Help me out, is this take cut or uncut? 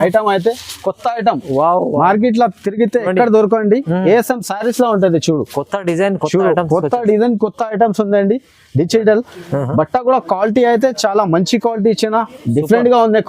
uncut